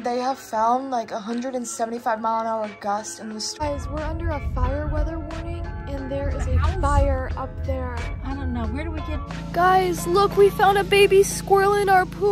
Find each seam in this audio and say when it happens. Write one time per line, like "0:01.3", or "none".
0:03.6
0:09.3